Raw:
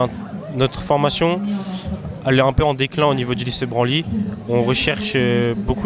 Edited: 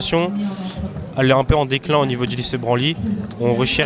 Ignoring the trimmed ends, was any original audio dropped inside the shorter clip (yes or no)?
no